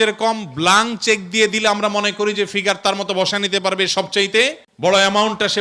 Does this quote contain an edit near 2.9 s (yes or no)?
no